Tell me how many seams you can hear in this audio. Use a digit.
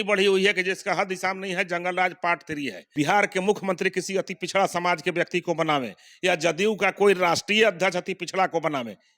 1